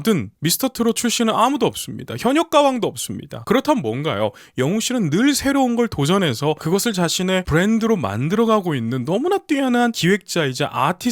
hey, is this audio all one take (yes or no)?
yes